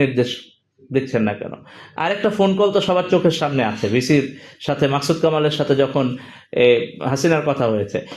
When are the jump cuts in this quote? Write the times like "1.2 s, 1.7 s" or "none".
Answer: none